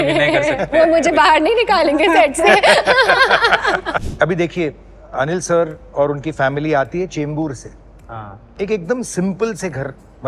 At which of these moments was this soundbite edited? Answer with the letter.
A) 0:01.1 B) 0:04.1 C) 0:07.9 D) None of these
B